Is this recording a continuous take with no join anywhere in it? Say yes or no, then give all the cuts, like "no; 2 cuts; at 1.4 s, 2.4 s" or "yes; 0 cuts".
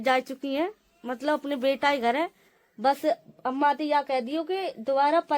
yes; 0 cuts